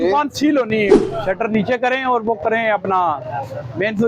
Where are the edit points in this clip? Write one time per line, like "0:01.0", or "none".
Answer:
0:01.0